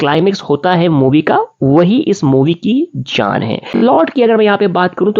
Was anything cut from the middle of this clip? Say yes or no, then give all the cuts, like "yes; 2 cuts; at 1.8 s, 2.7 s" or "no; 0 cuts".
yes; 1 cut; at 4.0 s